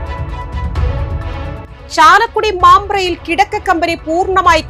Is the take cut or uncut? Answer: uncut